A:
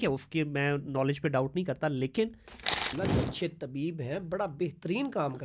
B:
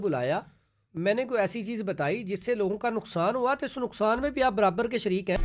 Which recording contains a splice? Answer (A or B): A